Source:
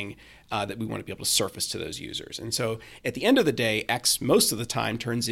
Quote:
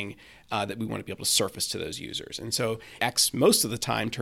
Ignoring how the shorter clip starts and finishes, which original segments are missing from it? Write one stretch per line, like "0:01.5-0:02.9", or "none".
0:03.0-0:03.8